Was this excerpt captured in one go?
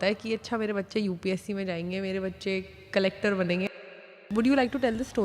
no; 1 cut; at 4.1 s

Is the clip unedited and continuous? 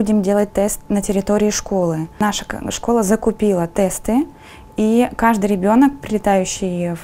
yes; 0 cuts

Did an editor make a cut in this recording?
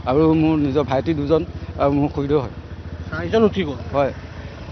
no; 0 cuts

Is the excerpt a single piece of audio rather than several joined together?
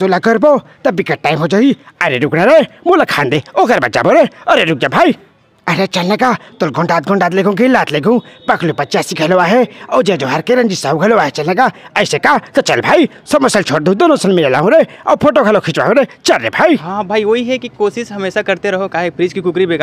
no; 1 cut; at 16.9 s

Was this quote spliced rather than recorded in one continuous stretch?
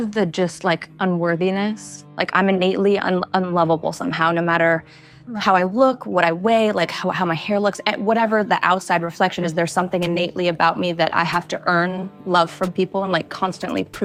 no; 0 cuts

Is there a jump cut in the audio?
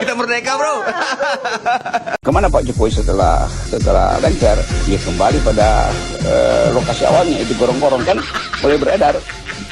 yes; 2 cuts; at 2.2 s, 3.6 s

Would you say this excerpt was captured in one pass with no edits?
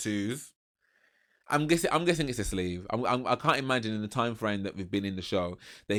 yes; 0 cuts

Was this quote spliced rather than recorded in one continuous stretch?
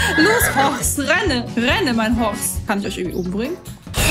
yes; 1 cut; at 2.5 s

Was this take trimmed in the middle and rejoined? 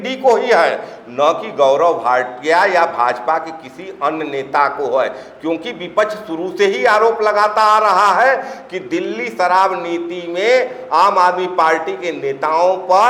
no; 0 cuts

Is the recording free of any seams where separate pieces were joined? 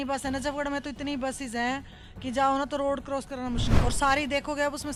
yes; 0 cuts

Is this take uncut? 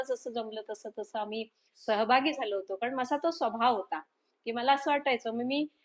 yes; 0 cuts

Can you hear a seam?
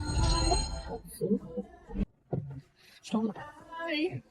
yes; 1 cut; at 2.0 s

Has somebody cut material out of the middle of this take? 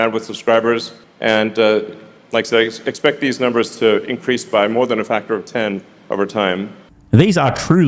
no; 0 cuts

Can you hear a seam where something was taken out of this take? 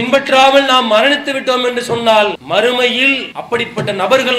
yes; 2 cuts; at 2.4 s, 3.3 s

